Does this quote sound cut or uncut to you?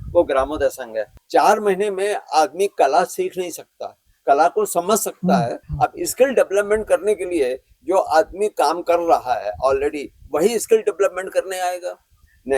cut